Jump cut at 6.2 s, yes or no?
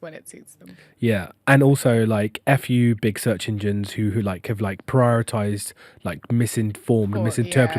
no